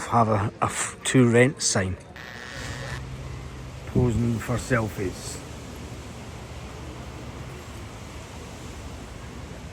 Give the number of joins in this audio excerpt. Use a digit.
1